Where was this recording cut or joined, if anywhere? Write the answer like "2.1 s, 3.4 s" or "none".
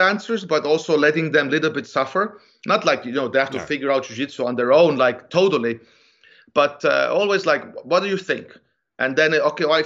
none